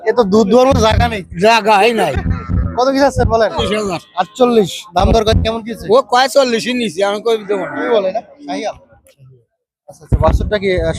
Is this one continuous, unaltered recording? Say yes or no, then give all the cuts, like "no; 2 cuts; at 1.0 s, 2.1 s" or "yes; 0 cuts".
no; 2 cuts; at 3.6 s, 7.9 s